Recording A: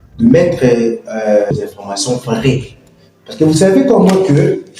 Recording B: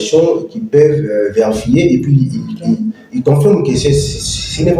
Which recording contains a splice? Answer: A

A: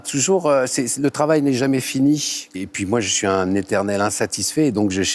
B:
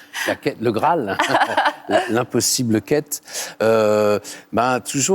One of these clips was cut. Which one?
A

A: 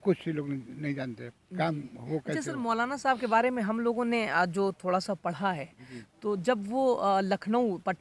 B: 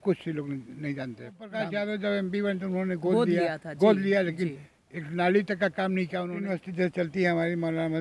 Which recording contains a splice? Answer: B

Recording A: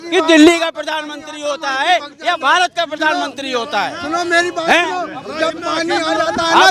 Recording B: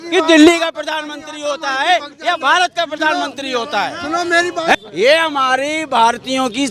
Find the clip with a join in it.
B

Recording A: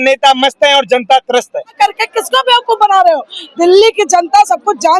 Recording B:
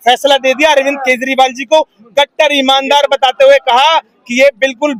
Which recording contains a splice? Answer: A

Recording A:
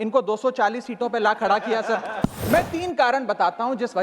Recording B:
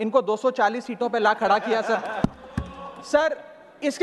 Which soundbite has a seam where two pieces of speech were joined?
A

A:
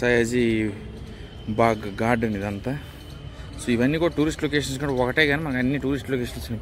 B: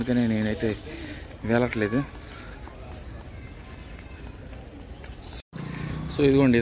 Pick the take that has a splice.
B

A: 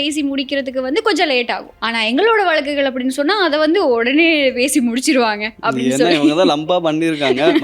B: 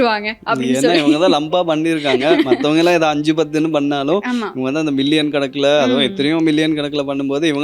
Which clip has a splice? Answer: A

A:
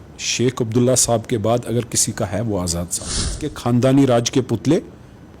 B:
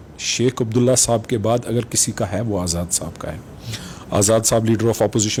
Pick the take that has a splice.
A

